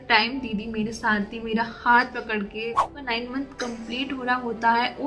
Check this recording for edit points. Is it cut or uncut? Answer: cut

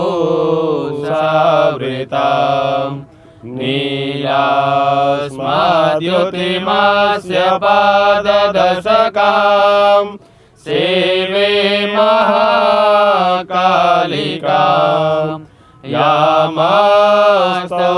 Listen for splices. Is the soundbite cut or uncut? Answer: uncut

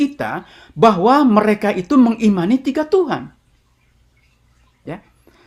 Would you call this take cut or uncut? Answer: uncut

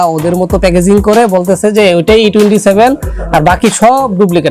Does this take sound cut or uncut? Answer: uncut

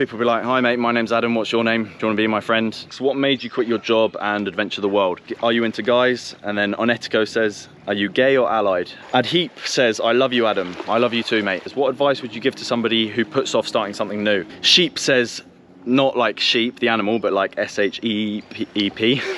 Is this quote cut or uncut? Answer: cut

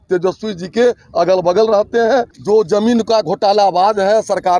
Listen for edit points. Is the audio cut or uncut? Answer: cut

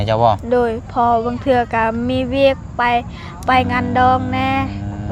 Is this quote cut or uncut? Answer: uncut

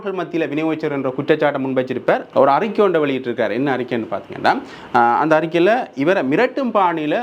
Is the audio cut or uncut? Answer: cut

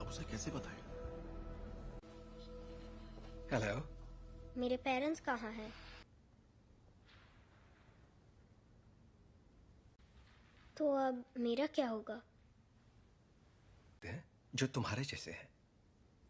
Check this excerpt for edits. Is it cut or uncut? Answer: cut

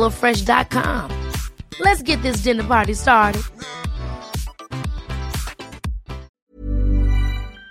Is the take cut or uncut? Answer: cut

